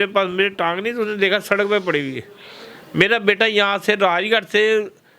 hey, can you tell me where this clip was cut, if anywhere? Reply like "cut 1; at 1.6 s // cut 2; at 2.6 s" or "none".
none